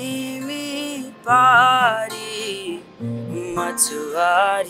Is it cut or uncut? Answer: uncut